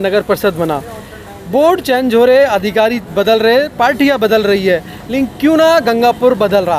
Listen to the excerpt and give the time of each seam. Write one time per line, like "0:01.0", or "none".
none